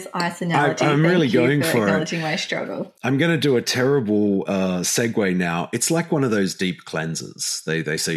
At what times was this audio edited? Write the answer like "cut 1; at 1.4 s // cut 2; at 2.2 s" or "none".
none